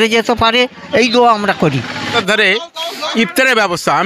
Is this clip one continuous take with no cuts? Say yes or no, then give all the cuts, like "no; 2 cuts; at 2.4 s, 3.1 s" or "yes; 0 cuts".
no; 1 cut; at 2.1 s